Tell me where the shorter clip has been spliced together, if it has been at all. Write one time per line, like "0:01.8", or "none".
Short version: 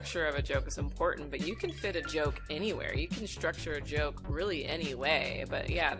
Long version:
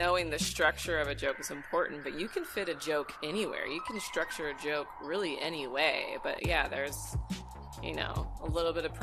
none